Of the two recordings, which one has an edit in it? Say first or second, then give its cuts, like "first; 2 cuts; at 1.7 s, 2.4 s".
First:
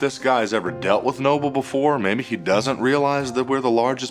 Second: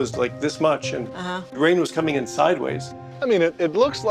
second; 2 cuts; at 1.4 s, 3.1 s